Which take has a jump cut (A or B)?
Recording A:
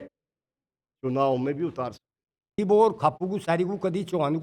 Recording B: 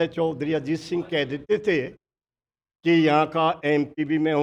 A